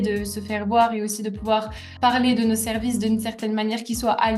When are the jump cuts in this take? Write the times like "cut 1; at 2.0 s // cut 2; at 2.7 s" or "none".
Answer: none